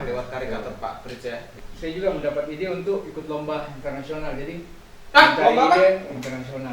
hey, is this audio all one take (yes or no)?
no